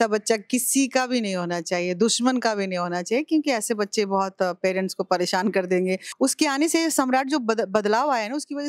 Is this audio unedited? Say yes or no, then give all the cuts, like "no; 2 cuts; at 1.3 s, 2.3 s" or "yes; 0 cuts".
no; 1 cut; at 6.1 s